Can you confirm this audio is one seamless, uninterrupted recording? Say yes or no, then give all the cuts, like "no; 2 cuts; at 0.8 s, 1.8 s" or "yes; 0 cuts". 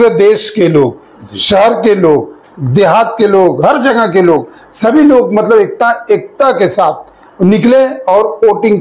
yes; 0 cuts